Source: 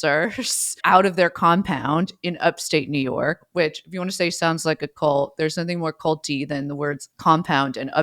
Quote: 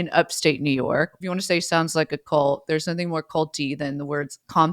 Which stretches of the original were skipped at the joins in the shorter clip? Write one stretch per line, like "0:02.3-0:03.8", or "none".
0:03.4-0:03.9